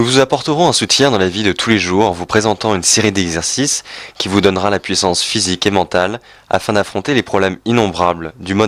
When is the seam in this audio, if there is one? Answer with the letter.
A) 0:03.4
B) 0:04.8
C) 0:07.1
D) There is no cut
A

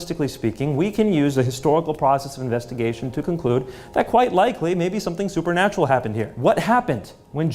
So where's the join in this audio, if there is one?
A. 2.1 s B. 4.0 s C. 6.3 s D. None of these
C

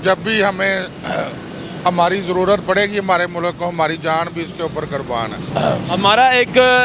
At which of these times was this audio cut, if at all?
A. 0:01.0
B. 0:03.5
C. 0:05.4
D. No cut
C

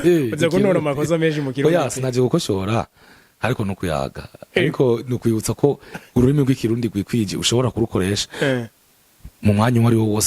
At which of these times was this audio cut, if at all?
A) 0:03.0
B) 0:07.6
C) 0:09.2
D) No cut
D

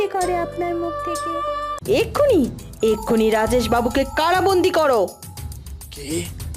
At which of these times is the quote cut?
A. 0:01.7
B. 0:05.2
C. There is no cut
A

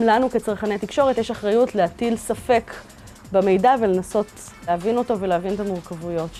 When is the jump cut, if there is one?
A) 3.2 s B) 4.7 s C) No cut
B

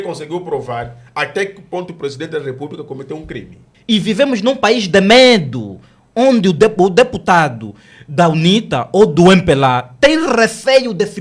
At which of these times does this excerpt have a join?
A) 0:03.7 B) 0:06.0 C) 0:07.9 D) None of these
A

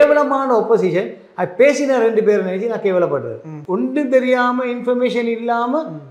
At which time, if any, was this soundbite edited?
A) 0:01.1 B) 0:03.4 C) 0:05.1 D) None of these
D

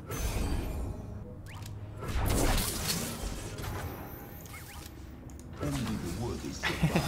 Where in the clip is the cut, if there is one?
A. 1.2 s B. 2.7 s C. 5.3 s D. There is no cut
A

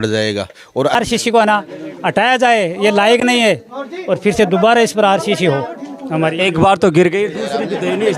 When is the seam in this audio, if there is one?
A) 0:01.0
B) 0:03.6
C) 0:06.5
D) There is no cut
A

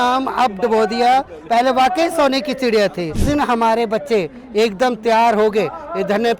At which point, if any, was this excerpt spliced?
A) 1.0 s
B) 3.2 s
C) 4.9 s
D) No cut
B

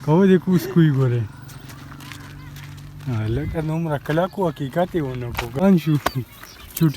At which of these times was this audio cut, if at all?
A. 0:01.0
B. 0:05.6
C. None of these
B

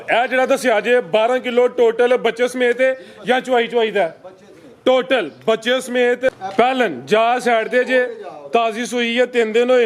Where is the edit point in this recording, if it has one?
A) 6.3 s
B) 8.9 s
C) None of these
A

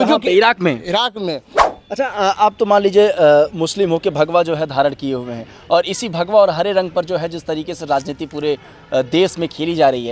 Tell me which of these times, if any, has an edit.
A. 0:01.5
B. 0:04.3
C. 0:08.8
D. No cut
A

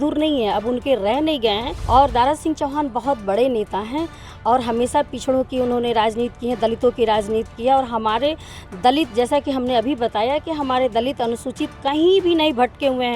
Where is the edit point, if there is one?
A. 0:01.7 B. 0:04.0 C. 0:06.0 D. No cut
A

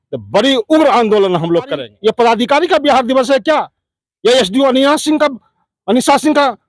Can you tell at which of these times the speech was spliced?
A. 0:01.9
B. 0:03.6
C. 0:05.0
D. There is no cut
A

